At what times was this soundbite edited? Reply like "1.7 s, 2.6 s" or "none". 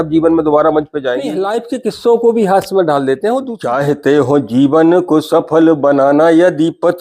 1.4 s, 3.6 s